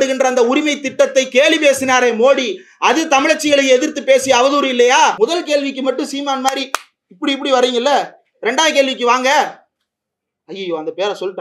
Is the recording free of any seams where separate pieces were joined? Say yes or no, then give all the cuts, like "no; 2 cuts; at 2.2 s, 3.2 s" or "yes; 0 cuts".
no; 1 cut; at 5.1 s